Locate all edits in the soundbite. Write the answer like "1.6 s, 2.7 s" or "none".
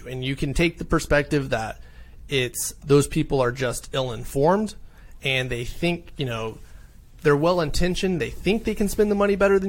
2.8 s